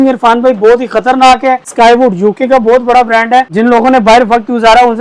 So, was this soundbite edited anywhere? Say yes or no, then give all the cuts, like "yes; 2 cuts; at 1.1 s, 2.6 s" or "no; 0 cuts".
yes; 2 cuts; at 1.7 s, 3.5 s